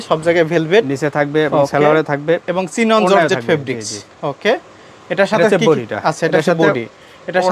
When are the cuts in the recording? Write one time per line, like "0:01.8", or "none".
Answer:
none